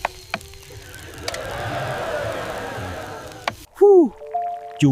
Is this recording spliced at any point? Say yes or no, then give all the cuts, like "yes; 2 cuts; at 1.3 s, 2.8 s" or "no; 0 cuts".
yes; 1 cut; at 3.6 s